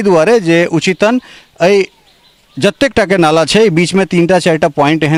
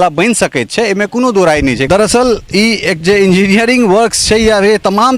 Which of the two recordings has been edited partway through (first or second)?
second